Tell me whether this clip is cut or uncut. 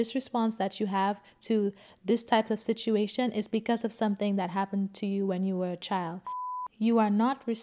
cut